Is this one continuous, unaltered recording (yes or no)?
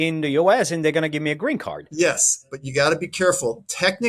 no